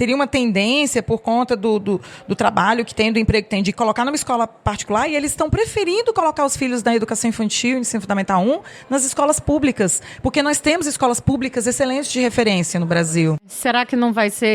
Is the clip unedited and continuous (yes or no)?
no